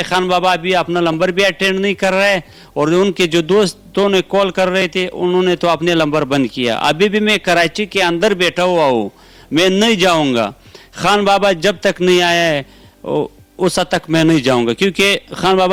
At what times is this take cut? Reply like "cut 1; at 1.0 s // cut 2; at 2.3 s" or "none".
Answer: none